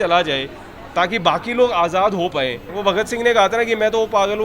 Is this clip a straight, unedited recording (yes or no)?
no